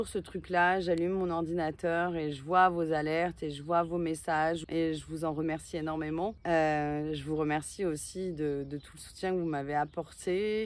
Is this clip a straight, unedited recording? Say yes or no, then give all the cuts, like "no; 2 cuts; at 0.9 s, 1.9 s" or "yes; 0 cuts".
no; 2 cuts; at 4.6 s, 6.4 s